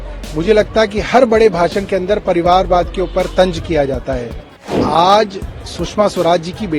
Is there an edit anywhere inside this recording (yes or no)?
yes